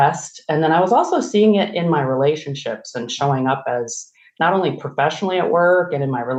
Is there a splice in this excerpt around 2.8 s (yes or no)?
no